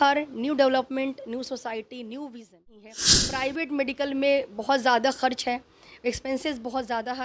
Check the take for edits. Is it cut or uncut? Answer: cut